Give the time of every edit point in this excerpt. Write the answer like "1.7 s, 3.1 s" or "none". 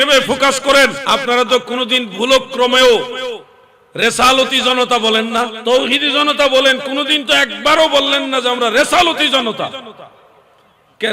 1.0 s, 5.6 s